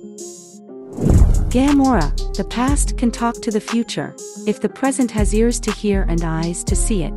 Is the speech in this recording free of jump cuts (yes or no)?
yes